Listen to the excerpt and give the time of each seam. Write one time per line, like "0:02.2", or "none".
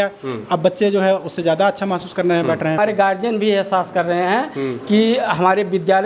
0:02.8